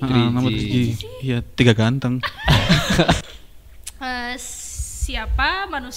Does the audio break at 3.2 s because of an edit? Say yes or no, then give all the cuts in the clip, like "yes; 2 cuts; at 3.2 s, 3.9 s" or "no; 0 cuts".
yes; 1 cut; at 3.2 s